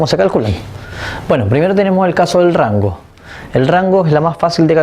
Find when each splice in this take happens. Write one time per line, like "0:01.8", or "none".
0:01.0

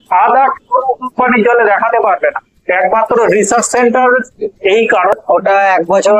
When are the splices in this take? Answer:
0:05.1

